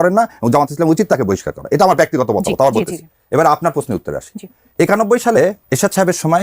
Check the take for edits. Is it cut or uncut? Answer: uncut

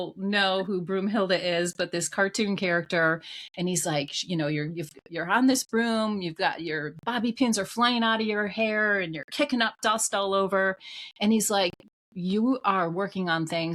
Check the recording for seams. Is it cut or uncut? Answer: uncut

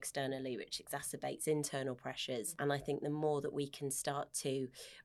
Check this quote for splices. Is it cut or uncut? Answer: cut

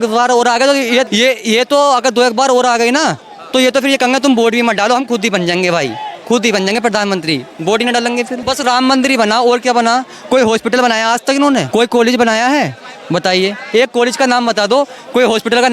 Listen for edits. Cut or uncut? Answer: cut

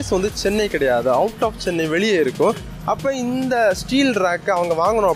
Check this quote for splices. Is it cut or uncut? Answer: uncut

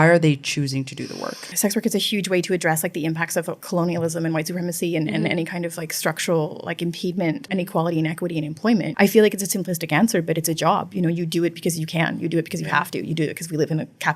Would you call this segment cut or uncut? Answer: cut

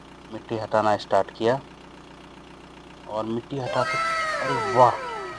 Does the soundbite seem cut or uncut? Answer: uncut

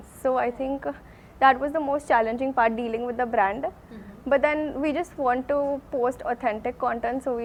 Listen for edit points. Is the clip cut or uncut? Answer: uncut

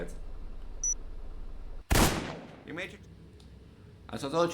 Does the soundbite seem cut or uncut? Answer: cut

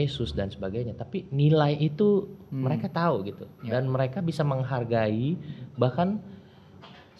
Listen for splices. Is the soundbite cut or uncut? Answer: uncut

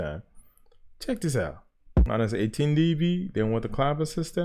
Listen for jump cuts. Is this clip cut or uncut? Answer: cut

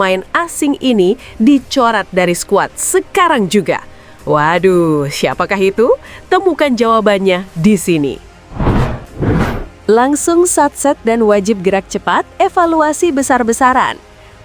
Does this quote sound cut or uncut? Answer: cut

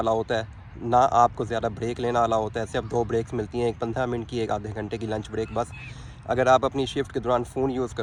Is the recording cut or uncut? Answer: uncut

